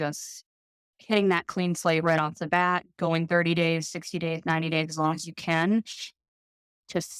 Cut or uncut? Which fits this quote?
uncut